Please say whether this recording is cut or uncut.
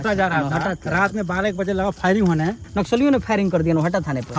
cut